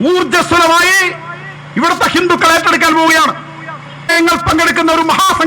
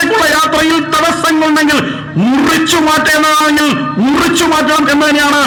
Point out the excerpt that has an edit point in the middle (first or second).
first